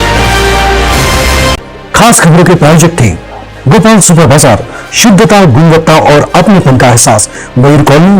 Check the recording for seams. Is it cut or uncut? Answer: cut